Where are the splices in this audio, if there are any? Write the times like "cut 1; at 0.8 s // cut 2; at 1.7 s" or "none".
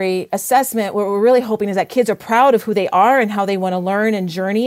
none